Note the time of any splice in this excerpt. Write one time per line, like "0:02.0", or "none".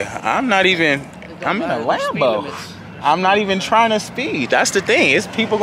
none